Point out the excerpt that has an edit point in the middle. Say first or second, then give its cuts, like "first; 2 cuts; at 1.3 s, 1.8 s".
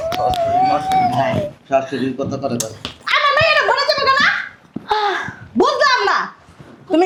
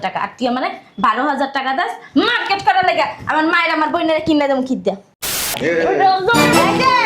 second; 1 cut; at 5.5 s